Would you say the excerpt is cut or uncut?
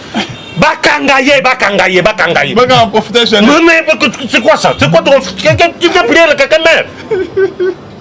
uncut